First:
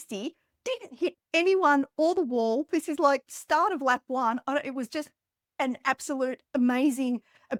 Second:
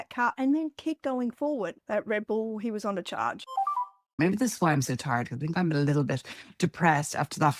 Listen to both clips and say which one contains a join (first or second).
second